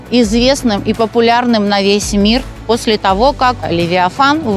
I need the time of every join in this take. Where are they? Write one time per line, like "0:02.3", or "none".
0:03.7